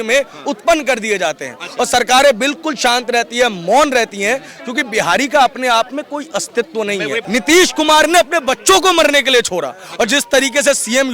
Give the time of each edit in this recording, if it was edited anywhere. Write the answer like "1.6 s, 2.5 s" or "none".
7.2 s

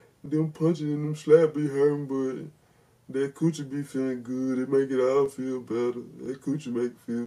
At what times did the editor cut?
none

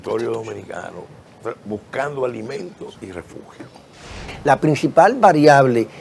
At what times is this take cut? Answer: 4.3 s

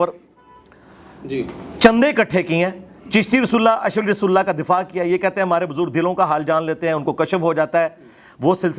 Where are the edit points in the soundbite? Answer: none

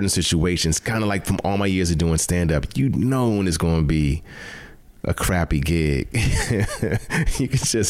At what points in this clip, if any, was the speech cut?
none

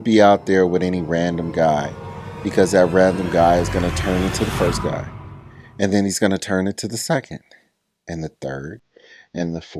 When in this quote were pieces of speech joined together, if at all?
none

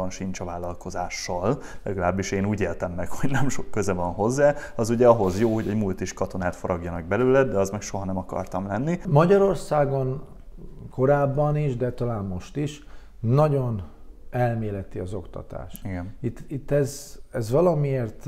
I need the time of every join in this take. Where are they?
9.0 s

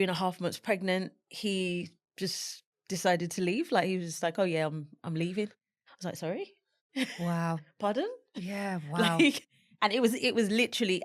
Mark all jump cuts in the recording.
none

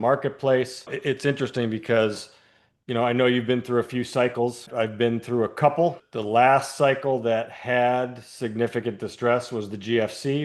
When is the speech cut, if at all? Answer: 0.9 s, 4.7 s, 6.1 s

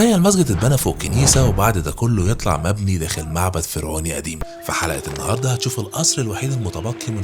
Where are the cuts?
4.4 s

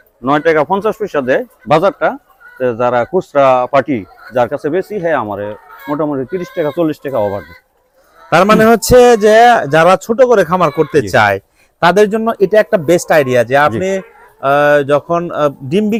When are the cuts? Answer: none

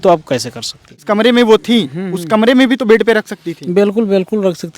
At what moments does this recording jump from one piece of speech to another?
1.0 s

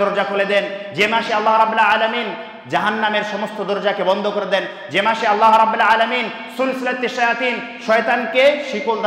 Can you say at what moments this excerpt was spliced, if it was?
none

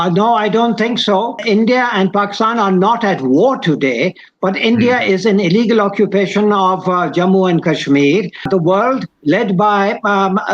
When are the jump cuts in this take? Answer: 1.4 s, 8.4 s

